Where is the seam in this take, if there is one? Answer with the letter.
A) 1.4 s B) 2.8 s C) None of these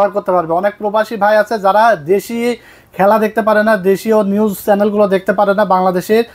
C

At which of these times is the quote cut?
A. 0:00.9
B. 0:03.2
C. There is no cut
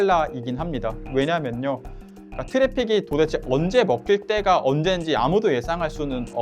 C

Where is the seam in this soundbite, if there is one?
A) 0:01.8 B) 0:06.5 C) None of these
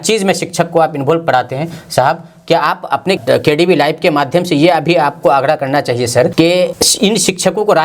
B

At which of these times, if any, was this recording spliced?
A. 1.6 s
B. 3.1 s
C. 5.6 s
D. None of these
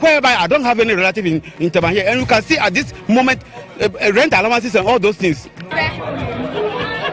C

